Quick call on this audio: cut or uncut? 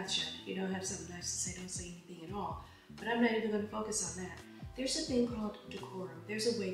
uncut